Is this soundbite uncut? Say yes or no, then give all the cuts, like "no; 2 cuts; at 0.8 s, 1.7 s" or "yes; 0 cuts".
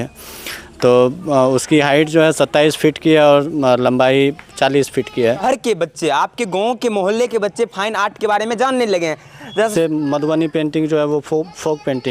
no; 2 cuts; at 5.4 s, 9.7 s